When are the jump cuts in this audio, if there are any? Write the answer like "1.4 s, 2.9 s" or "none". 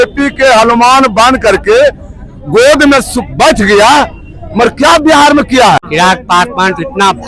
5.8 s